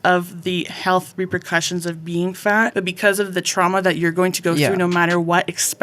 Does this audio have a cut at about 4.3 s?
no; 1 cut; at 2.7 s

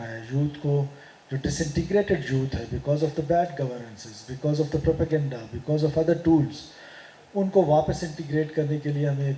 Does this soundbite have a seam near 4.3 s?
no; 0 cuts

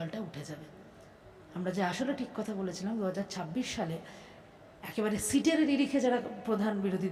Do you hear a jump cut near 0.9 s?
no; 0 cuts

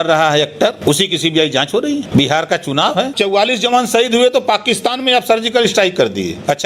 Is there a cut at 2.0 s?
yes; 3 cuts; at 0.8 s, 2.0 s, 3.1 s

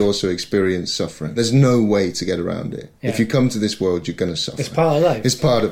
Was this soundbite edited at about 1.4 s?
yes; 1 cut; at 1.4 s

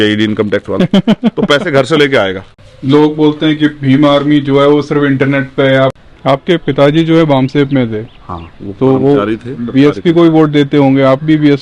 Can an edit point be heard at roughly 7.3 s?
no; 2 cuts; at 2.5 s, 5.9 s

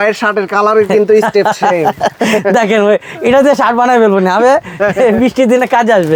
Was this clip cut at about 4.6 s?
no; 0 cuts

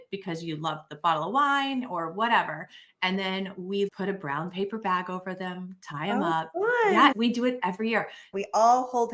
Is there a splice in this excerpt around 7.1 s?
yes; 3 cuts; at 3.9 s, 7.1 s, 8.3 s

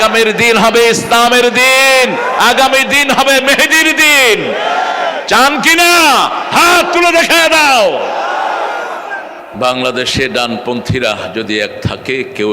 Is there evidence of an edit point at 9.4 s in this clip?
yes; 1 cut; at 9.4 s

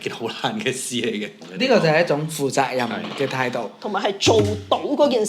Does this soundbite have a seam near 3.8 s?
no; 1 cut; at 1.4 s

